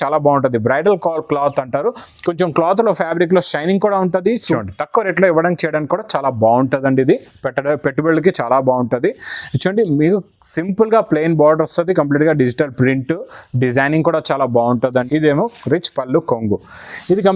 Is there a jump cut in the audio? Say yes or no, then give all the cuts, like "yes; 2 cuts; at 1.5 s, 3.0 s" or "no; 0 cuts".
yes; 2 cuts; at 4.4 s, 15.1 s